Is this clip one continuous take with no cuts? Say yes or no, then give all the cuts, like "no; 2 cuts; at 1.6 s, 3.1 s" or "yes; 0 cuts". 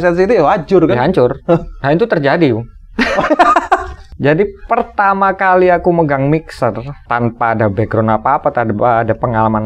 no; 2 cuts; at 4.0 s, 6.9 s